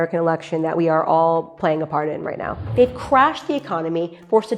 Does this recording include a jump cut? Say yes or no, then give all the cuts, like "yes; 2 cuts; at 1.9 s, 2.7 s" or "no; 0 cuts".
yes; 1 cut; at 2.7 s